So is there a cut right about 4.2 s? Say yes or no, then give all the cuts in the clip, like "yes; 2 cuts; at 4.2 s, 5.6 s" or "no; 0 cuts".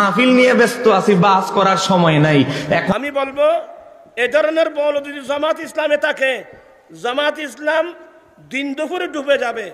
no; 1 cut; at 2.9 s